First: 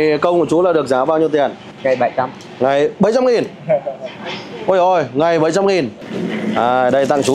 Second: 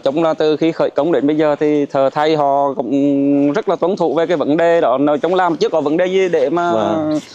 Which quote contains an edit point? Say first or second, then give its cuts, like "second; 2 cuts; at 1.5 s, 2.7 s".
first; 2 cuts; at 1.7 s, 6.0 s